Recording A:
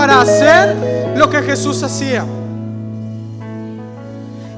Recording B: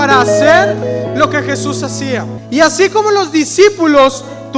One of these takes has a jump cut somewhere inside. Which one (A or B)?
B